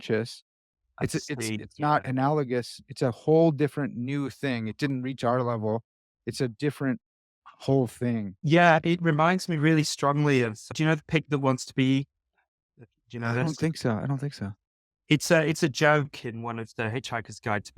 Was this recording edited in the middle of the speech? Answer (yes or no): yes